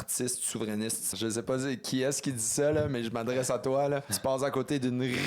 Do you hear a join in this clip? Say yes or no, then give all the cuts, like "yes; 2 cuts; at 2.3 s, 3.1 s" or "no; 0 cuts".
yes; 2 cuts; at 1.1 s, 4.1 s